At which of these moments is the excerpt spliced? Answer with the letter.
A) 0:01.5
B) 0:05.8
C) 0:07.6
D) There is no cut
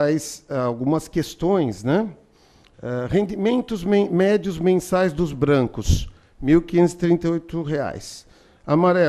D